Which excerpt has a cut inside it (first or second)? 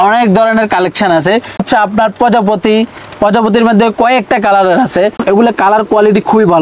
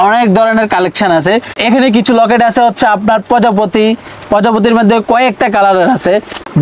first